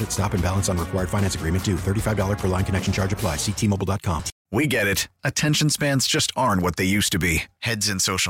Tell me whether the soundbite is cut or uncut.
cut